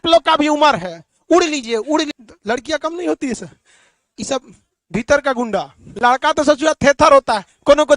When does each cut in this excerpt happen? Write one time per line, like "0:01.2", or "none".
0:02.2
0:05.8